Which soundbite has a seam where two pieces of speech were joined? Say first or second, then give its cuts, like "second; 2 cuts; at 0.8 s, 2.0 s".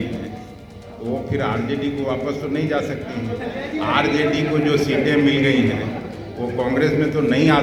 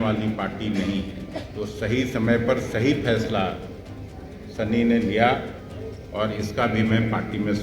second; 1 cut; at 1.4 s